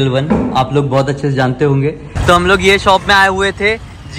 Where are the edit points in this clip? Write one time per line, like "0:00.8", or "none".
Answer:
0:02.1